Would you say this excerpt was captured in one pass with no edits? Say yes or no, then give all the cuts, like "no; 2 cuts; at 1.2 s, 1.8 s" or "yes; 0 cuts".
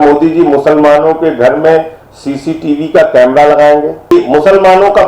no; 1 cut; at 4.1 s